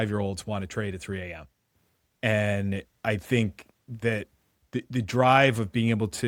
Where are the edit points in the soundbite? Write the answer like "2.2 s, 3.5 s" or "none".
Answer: none